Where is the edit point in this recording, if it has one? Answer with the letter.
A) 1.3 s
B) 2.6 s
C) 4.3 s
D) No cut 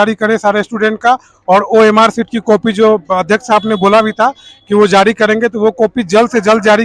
D